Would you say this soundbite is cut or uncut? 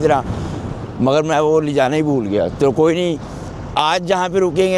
uncut